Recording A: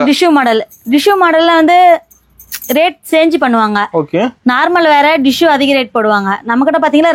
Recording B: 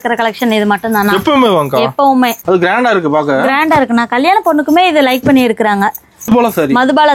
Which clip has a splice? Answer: B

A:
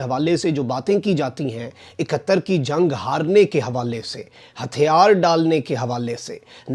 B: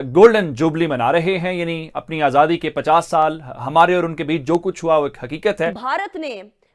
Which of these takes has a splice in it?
B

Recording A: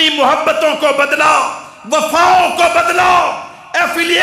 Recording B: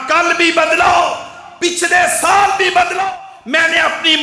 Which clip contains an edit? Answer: B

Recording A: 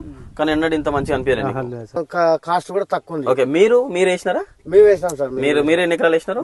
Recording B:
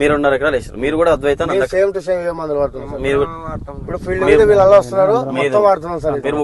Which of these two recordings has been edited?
A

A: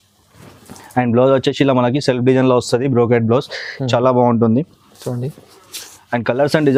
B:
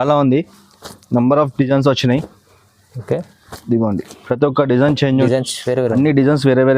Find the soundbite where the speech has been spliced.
B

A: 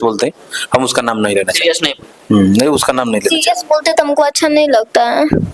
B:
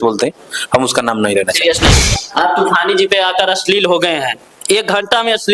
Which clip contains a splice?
B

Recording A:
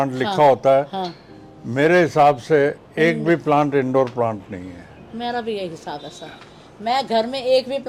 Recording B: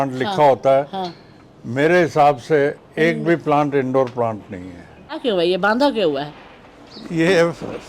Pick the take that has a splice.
B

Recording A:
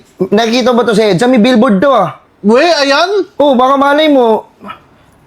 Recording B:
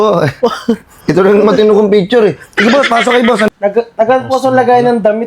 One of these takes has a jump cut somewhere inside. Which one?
B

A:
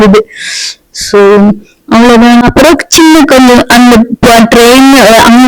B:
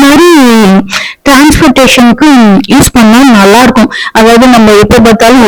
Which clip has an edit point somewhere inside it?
A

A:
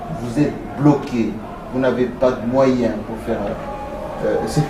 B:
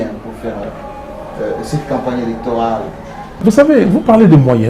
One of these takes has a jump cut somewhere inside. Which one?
B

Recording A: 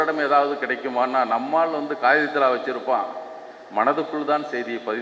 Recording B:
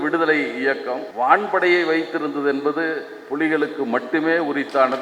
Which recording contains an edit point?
B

